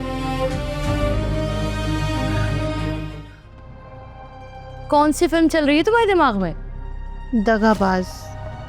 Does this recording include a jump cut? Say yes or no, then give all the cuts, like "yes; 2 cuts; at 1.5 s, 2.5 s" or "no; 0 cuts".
yes; 1 cut; at 3.3 s